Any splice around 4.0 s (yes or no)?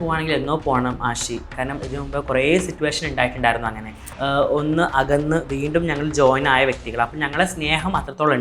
yes